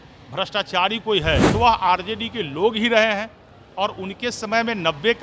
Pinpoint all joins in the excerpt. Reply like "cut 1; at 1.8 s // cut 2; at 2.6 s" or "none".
cut 1; at 1.5 s